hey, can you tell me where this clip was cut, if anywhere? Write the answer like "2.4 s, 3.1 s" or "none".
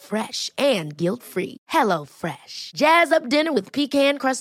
none